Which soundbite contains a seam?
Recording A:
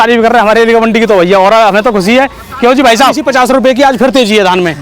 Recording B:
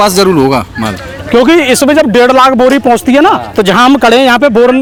A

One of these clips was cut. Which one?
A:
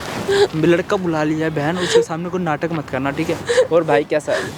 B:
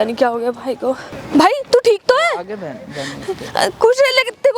B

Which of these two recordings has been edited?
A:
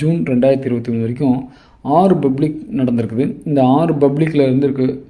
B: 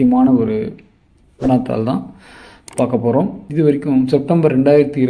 B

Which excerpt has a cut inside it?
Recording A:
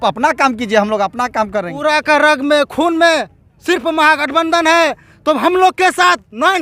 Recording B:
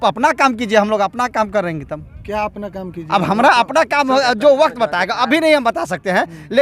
A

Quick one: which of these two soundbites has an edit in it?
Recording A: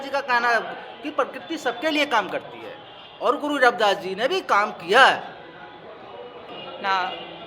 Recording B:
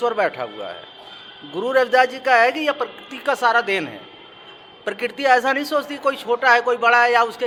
A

